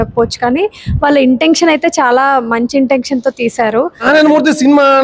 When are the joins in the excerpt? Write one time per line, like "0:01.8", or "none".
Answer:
0:04.0